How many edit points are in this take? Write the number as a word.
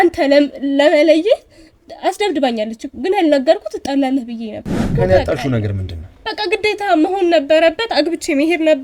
one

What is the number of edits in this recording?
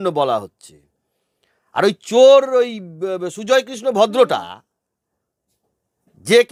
zero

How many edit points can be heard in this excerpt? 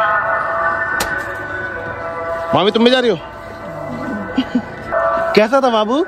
one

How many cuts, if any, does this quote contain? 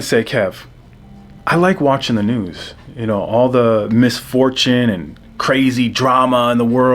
zero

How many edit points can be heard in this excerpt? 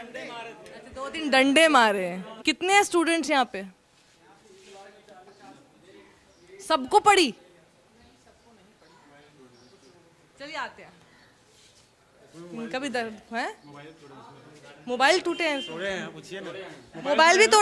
zero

